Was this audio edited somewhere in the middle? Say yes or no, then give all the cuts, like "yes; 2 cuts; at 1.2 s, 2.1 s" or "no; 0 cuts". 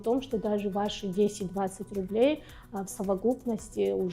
no; 0 cuts